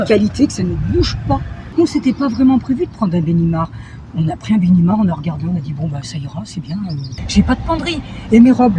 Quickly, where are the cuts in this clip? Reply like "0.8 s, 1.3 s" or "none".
1.6 s, 7.2 s